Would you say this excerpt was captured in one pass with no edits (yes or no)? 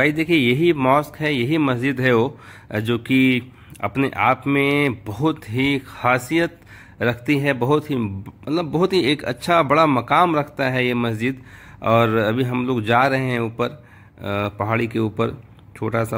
yes